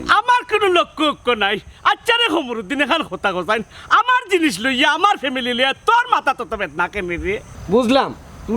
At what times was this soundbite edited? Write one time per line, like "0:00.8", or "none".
0:07.5